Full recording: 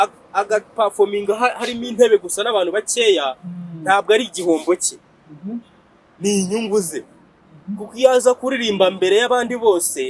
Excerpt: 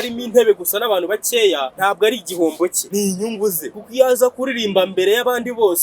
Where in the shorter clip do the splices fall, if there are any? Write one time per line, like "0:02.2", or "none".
0:01.7
0:02.8
0:03.8